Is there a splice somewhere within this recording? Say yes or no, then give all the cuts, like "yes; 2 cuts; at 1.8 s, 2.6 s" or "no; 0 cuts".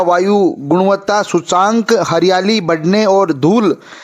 no; 0 cuts